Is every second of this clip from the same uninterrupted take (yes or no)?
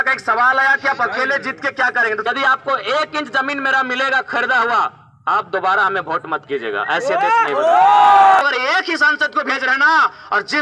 no